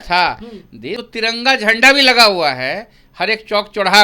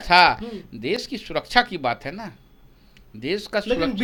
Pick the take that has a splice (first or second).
first